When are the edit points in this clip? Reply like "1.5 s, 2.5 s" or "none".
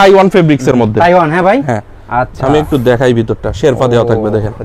none